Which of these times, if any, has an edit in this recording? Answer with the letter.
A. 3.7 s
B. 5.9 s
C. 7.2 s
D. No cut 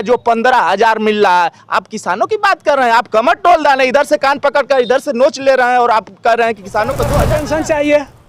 C